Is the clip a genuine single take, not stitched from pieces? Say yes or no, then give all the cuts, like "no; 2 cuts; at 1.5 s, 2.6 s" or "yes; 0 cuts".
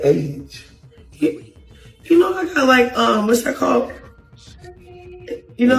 yes; 0 cuts